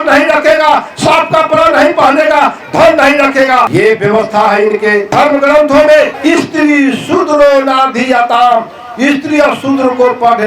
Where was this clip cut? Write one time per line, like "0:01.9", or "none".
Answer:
0:03.7
0:05.1
0:06.1